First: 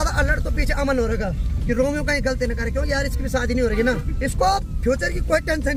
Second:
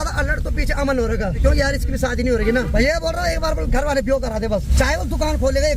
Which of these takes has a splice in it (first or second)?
second